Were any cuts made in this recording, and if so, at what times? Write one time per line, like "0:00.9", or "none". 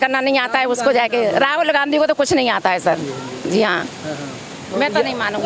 none